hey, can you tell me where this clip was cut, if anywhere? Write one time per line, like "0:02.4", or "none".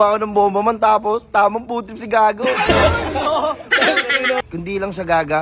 0:04.4